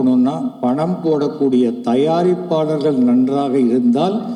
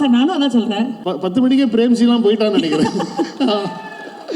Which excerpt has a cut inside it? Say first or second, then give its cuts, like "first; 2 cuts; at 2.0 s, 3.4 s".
second; 1 cut; at 1.0 s